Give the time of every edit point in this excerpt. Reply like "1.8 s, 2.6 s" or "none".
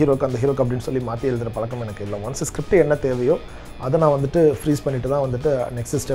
none